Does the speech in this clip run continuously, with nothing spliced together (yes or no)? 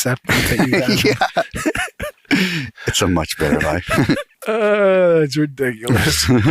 no